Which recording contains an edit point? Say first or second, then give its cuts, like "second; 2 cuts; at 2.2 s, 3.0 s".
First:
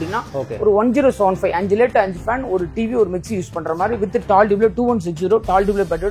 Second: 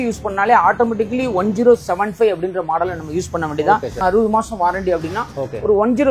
second; 1 cut; at 3.9 s